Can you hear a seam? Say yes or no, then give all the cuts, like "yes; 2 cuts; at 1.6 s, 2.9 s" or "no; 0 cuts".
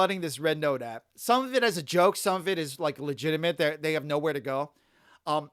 no; 0 cuts